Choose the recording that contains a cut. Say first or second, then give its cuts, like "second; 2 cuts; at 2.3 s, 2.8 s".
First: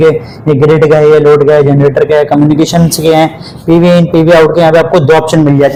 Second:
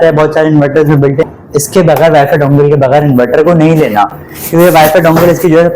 second; 1 cut; at 1.3 s